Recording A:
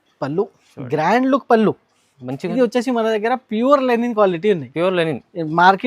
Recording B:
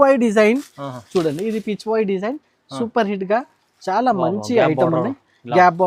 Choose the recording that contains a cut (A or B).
A